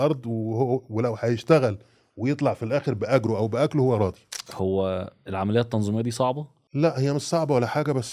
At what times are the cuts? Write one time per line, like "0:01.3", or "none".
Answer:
0:04.4
0:06.5